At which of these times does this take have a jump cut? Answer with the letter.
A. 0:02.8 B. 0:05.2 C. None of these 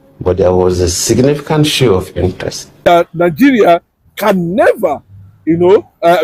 A